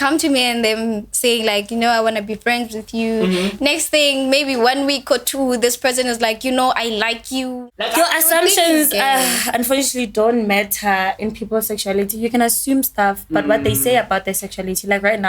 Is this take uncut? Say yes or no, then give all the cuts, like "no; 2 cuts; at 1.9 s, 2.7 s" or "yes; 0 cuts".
no; 1 cut; at 7.5 s